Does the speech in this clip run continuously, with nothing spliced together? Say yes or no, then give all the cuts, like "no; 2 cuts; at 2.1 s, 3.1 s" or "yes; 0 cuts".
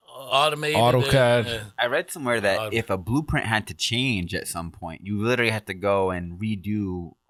yes; 0 cuts